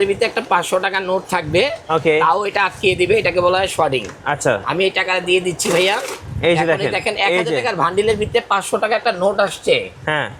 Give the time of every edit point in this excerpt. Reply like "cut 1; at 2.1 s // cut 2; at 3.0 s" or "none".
none